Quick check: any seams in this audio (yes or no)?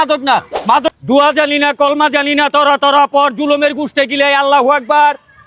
yes